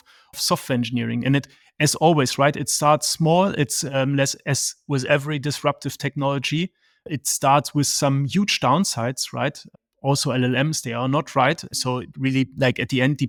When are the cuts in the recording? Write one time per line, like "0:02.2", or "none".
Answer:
none